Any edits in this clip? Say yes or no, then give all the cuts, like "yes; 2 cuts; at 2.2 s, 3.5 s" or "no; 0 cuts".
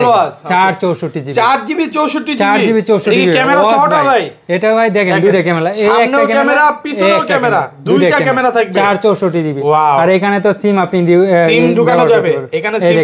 no; 0 cuts